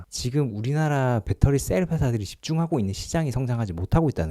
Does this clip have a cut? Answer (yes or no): no